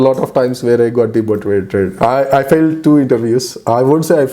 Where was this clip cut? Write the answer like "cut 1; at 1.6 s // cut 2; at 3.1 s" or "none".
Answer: cut 1; at 1.9 s